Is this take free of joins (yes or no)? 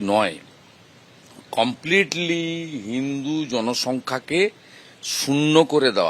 yes